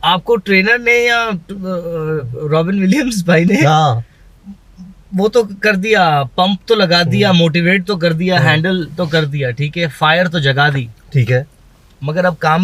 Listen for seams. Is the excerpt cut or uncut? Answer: uncut